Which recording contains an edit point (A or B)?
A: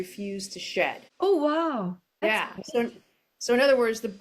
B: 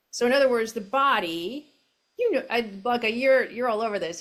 A